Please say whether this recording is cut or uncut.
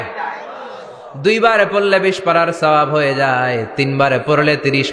uncut